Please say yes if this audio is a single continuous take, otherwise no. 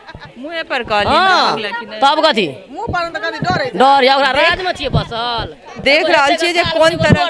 yes